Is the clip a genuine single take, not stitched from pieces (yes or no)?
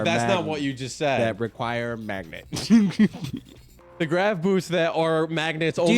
yes